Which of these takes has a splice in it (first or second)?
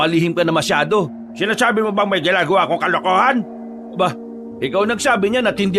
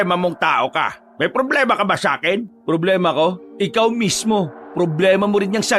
second